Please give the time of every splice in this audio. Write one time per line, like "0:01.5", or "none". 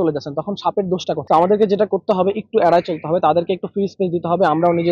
0:01.2